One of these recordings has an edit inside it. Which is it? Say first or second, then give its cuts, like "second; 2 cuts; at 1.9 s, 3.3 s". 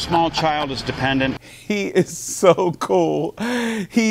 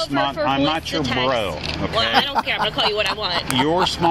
first; 1 cut; at 1.4 s